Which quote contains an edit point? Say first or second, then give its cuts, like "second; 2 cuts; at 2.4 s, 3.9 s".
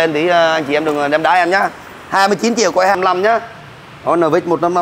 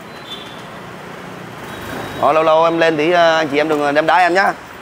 first; 1 cut; at 3.0 s